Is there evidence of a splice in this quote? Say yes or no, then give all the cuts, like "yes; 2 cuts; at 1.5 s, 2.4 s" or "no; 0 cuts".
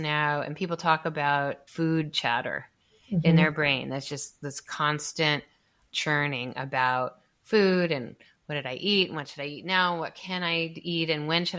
yes; 1 cut; at 1.6 s